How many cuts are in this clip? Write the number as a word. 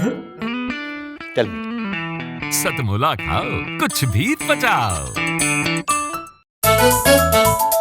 one